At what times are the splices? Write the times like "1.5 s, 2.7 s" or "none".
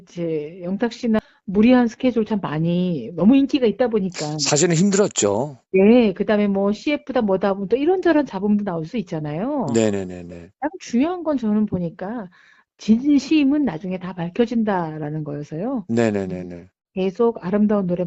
1.0 s